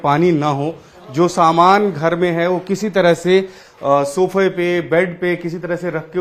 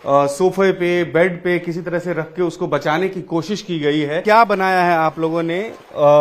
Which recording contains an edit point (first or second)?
second